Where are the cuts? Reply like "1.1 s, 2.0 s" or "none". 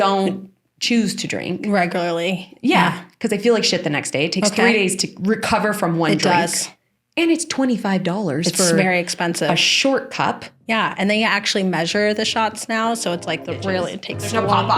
10.6 s